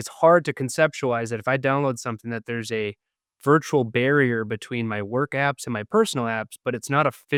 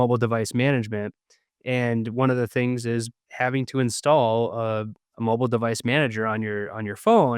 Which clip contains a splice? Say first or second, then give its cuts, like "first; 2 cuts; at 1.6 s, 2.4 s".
second; 2 cuts; at 3.3 s, 5.0 s